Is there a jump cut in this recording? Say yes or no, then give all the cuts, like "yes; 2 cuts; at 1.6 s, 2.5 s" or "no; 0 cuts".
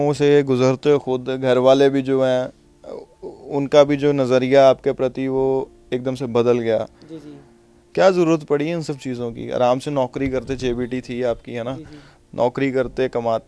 no; 0 cuts